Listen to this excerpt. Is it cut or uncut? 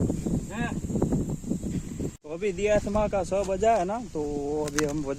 uncut